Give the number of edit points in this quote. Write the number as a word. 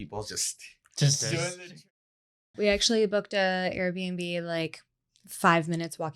one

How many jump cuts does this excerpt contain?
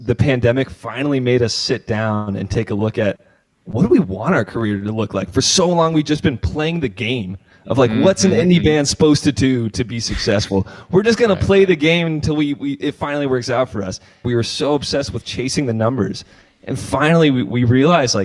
one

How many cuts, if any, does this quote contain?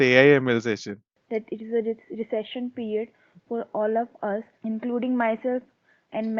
two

